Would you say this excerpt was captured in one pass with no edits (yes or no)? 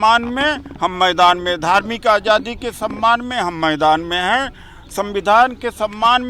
yes